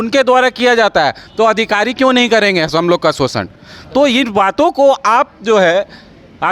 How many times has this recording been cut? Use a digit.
0